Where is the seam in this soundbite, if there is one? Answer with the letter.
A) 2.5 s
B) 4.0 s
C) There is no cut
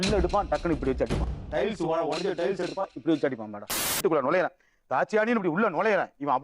B